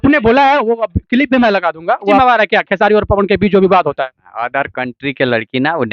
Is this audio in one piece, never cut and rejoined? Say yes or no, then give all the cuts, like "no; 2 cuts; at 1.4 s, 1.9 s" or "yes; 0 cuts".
no; 1 cut; at 2.2 s